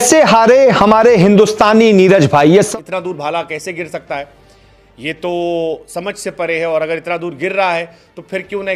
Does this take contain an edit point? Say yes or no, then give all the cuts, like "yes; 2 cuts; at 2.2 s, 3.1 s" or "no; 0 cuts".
yes; 1 cut; at 2.7 s